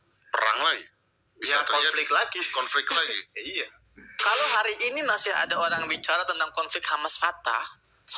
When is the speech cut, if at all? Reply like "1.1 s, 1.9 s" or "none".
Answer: 4.1 s

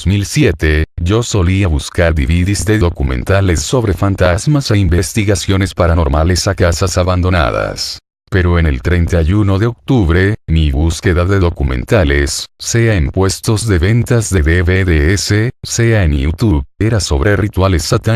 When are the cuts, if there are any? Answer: 4.8 s

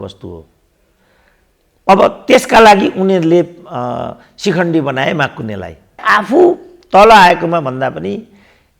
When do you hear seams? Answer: 6.0 s

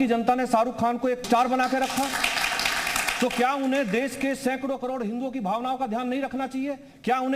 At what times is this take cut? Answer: 1.2 s

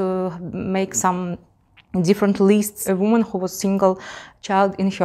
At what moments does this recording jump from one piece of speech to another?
2.8 s

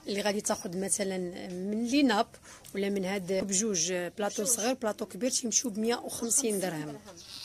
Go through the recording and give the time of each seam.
3.4 s

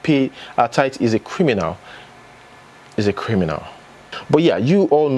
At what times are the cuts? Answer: 4.0 s

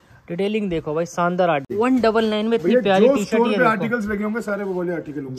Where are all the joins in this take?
1.7 s

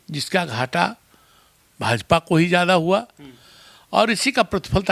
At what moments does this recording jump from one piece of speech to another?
none

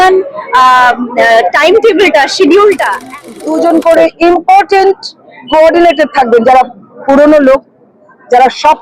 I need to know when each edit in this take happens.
3.3 s

